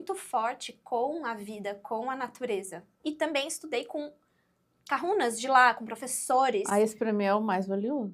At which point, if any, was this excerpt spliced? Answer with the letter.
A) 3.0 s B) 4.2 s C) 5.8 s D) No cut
A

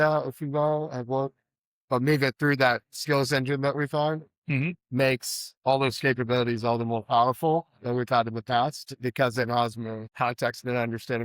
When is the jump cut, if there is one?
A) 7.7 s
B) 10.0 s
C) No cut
B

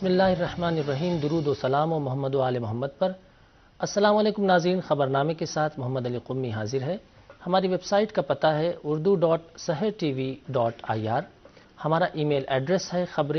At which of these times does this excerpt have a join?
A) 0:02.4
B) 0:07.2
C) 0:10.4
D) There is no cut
A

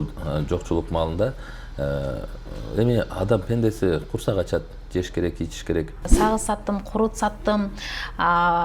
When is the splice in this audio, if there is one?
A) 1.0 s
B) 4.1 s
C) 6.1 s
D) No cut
C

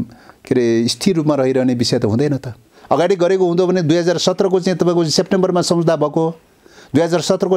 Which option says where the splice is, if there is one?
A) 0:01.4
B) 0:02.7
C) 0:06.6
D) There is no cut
B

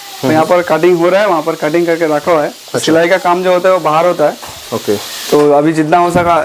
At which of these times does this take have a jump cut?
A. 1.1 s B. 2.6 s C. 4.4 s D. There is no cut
D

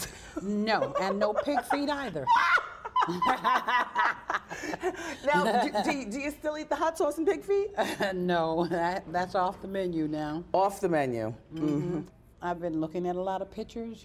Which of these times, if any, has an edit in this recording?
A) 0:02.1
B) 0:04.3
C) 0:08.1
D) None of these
C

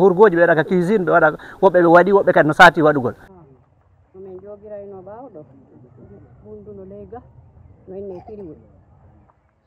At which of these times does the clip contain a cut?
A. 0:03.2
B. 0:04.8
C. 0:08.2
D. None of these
A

